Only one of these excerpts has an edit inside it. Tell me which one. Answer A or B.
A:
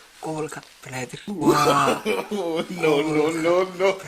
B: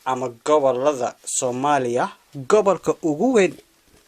A